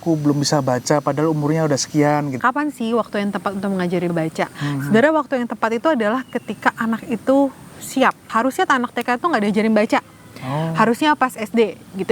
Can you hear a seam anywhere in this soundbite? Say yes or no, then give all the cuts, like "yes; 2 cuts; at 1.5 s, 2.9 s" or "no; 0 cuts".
yes; 3 cuts; at 2.4 s, 4.1 s, 8.2 s